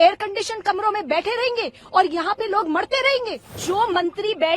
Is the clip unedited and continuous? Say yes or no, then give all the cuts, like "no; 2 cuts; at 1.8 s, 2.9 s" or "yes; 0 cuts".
no; 1 cut; at 3.6 s